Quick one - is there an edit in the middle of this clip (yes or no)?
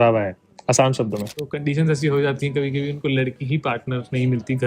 yes